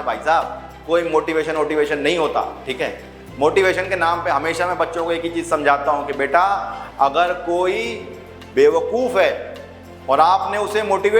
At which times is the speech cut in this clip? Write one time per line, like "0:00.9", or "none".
none